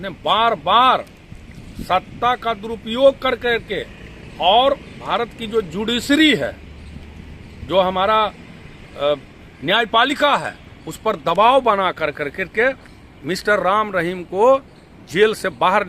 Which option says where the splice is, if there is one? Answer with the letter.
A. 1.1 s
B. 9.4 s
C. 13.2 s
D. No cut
D